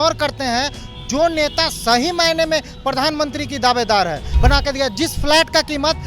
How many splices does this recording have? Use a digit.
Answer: 1